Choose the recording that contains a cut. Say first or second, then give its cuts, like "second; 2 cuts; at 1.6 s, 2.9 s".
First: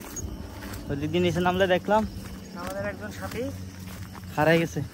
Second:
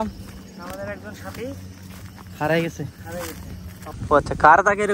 second; 1 cut; at 3.9 s